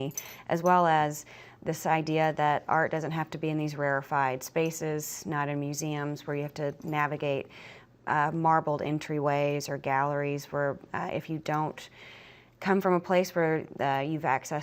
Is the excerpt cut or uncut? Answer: uncut